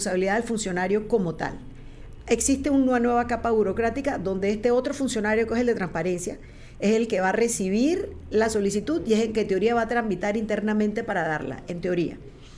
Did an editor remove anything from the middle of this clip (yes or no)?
no